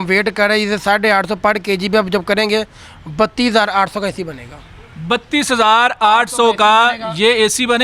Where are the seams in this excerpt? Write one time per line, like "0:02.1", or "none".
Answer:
none